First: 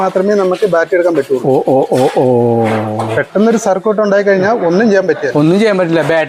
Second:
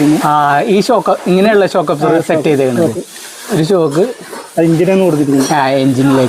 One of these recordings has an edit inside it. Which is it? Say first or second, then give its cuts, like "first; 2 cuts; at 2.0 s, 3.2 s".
second; 1 cut; at 3.5 s